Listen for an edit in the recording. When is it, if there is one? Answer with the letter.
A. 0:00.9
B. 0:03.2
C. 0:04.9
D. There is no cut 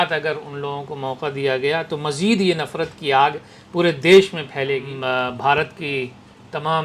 C